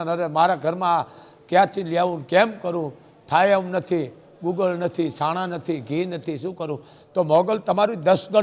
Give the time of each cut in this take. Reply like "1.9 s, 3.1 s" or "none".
none